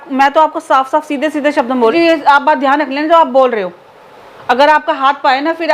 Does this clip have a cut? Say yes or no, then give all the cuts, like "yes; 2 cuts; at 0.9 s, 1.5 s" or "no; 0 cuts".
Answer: yes; 1 cut; at 1.8 s